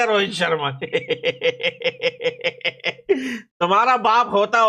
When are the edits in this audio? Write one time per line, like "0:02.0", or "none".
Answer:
none